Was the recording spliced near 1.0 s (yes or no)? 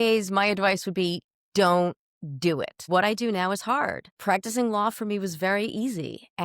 no